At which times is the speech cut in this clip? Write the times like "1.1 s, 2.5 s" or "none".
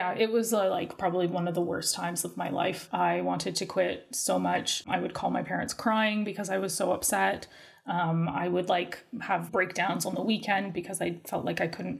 2.8 s, 4.8 s, 9.5 s